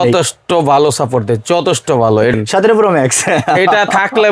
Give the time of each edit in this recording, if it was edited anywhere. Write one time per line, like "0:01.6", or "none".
0:02.3